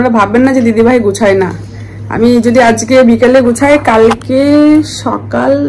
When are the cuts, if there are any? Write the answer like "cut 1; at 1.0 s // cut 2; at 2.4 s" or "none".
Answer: none